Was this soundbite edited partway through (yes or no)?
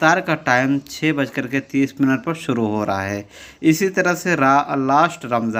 no